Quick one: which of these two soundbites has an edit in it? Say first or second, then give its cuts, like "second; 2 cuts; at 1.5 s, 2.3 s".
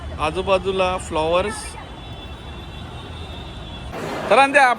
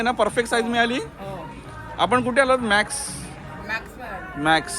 first; 1 cut; at 3.9 s